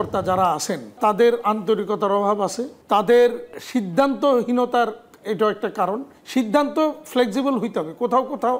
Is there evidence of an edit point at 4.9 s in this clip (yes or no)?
no